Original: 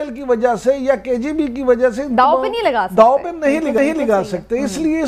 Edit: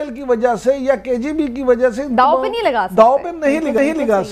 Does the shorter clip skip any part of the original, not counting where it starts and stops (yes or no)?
no